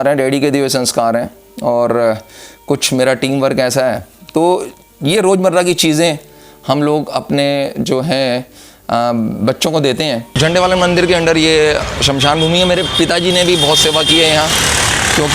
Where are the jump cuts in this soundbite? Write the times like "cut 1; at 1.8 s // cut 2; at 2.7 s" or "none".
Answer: cut 1; at 10.3 s